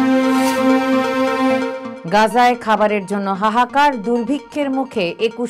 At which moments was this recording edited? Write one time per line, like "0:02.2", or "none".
none